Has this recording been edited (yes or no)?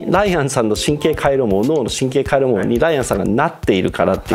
no